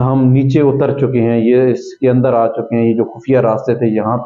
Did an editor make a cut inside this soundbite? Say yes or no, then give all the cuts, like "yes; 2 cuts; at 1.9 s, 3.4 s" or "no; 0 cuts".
no; 0 cuts